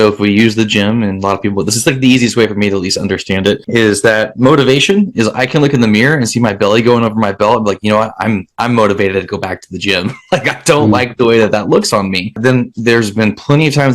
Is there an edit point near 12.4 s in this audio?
yes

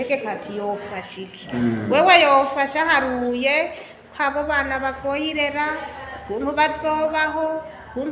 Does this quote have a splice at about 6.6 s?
no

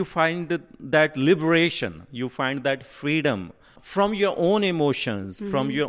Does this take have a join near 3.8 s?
no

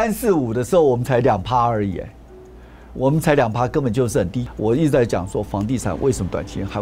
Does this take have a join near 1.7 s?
no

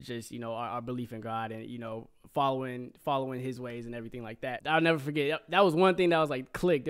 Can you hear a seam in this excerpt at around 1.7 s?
no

